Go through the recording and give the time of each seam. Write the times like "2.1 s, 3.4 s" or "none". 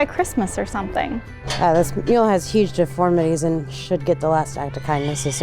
1.4 s